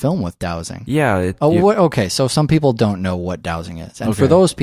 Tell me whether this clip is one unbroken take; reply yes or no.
yes